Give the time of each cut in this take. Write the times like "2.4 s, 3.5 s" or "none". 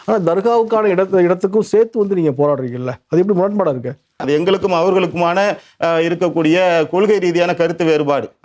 4.2 s